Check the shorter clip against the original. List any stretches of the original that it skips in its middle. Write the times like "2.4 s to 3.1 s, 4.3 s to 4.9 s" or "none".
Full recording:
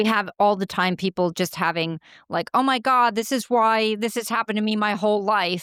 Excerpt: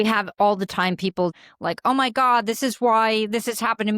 1.3 s to 2.0 s

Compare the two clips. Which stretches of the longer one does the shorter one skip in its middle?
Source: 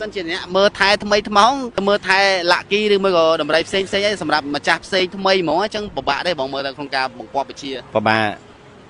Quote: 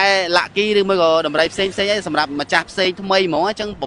none

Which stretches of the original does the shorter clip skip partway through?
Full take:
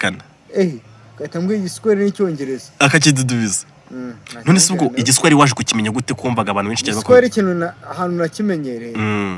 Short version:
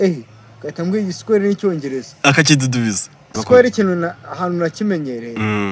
3.9 s to 6.9 s

